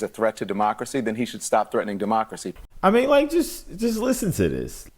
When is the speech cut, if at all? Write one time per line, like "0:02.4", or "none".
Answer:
0:02.5